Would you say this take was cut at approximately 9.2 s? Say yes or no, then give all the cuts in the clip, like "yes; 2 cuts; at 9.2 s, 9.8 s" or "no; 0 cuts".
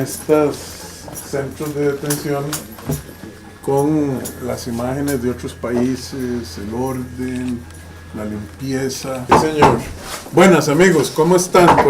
yes; 1 cut; at 9.2 s